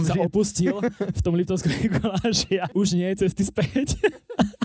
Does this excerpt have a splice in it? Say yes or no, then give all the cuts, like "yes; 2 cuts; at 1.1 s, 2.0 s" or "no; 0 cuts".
yes; 1 cut; at 2.7 s